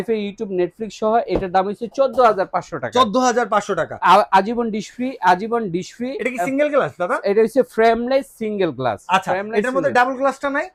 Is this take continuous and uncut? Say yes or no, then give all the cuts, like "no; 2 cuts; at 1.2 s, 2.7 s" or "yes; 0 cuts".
yes; 0 cuts